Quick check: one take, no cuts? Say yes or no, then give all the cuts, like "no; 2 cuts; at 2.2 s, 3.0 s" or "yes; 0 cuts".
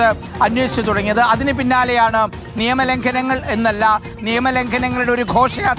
yes; 0 cuts